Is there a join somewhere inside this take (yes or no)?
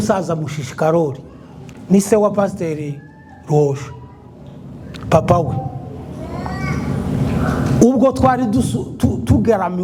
no